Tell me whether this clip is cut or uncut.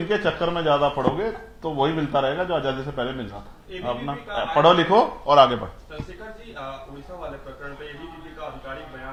uncut